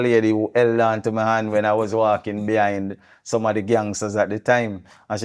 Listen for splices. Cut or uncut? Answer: uncut